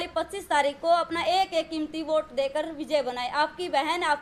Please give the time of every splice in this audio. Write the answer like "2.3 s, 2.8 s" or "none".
none